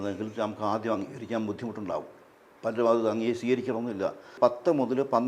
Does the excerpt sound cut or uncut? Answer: cut